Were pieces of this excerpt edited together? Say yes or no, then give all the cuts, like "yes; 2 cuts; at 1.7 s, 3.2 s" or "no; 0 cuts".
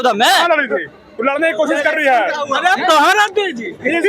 no; 0 cuts